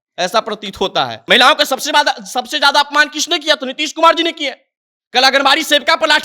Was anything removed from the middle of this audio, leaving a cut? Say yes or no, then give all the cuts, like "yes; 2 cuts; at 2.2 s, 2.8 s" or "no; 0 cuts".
yes; 1 cut; at 1.2 s